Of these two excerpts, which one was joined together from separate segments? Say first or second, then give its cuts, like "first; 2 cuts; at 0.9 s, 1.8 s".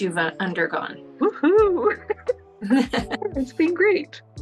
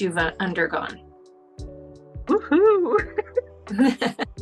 first; 2 cuts; at 1.0 s, 3.1 s